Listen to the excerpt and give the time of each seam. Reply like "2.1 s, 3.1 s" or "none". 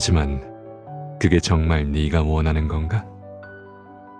3.0 s